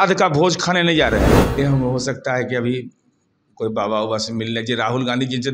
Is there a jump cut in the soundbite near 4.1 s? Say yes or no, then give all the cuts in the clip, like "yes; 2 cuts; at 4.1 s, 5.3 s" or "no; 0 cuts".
no; 1 cut; at 1.6 s